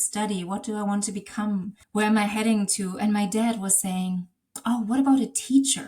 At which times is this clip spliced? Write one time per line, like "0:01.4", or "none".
0:01.8